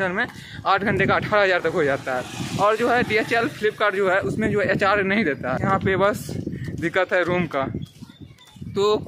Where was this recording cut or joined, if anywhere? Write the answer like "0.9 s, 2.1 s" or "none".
5.6 s